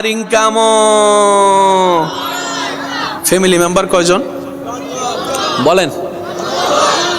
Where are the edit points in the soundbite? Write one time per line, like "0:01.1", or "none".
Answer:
0:03.1